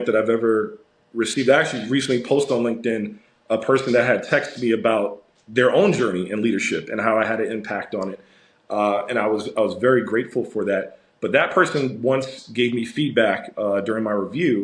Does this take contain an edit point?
no; 0 cuts

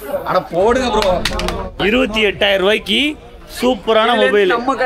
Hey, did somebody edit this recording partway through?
yes; 1 cut; at 1.8 s

